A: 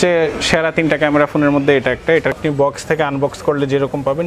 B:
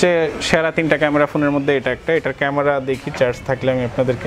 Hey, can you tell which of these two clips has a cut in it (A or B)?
A